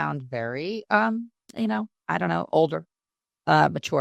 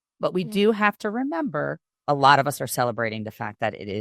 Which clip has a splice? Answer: second; 1 cut; at 1.9 s

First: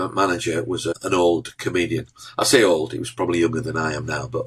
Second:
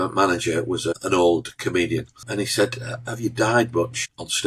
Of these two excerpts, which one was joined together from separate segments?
second; 1 cut; at 2.2 s

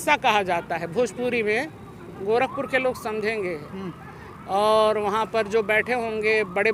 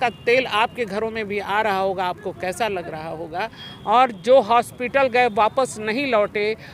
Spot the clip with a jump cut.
second; 1 cut; at 3.7 s

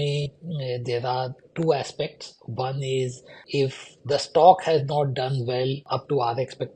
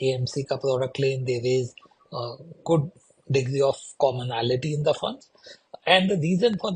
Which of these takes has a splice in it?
first; 2 cuts; at 3.4 s, 5.8 s

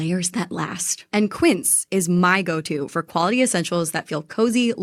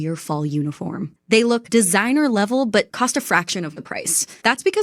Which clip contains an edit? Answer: second; 2 cuts; at 1.1 s, 2.9 s

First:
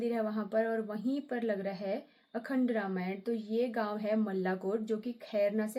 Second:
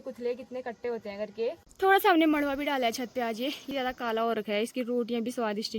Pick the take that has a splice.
second; 2 cuts; at 1.7 s, 3.7 s

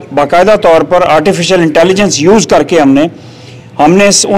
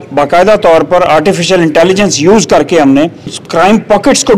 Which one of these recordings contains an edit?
second; 1 cut; at 3.4 s

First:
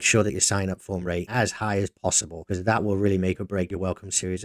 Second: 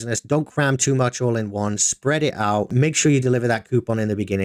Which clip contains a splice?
first; 3 cuts; at 1.3 s, 2.3 s, 3.7 s

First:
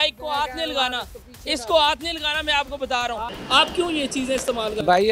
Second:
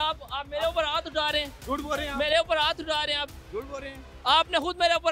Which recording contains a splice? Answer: first; 2 cuts; at 1.1 s, 3.3 s

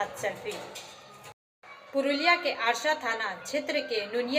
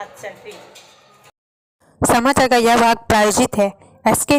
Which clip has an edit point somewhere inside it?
first; 1 cut; at 1.5 s

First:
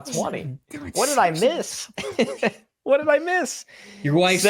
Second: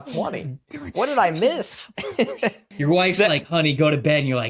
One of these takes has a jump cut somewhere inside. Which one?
second; 1 cut; at 2.7 s

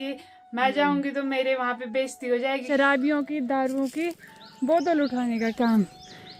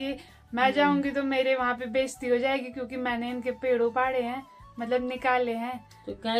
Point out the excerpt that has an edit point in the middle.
first; 1 cut; at 2.6 s

